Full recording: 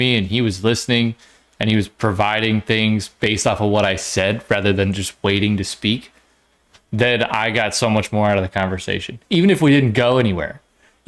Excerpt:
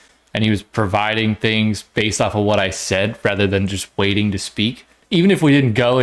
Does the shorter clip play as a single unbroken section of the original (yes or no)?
no